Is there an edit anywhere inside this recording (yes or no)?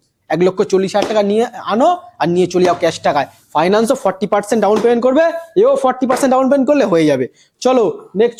no